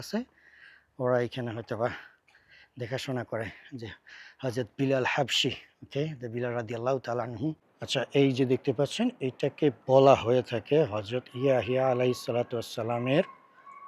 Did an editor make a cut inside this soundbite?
yes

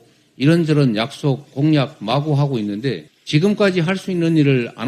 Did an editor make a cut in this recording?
yes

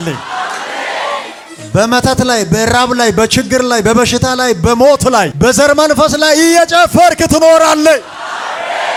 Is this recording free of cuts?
yes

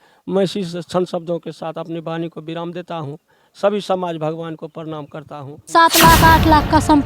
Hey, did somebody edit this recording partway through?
yes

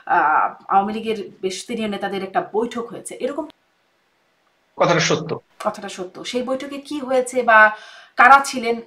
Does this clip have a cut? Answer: yes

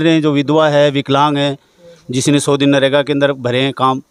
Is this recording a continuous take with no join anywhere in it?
yes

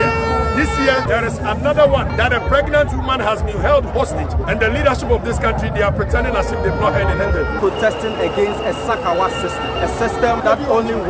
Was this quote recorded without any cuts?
no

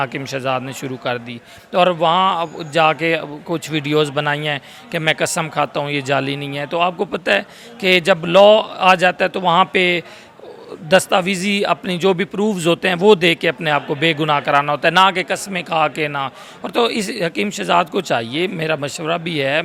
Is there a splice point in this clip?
no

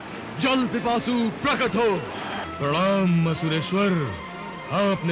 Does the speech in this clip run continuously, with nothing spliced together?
no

